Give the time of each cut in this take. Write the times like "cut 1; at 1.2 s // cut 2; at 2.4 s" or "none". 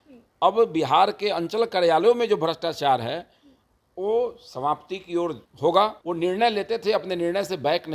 cut 1; at 5.5 s // cut 2; at 6.0 s